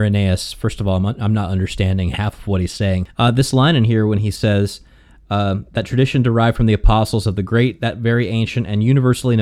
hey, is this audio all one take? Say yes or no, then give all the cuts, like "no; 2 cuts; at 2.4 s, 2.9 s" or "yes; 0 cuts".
no; 1 cut; at 3.1 s